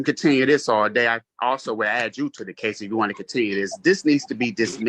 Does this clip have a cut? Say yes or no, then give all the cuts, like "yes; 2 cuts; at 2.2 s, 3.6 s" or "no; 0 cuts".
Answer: no; 0 cuts